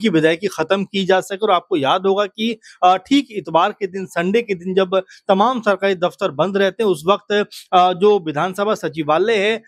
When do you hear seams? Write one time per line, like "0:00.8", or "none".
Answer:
none